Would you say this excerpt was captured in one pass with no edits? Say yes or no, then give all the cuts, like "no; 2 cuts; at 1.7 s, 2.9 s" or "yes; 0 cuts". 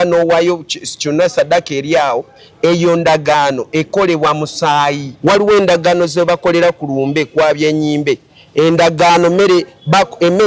no; 1 cut; at 5.1 s